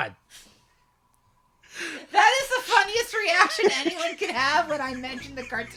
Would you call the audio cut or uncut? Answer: cut